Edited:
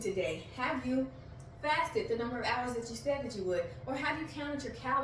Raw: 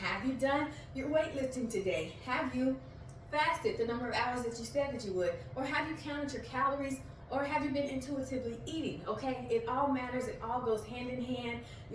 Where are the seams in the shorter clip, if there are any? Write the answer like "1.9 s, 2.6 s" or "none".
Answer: none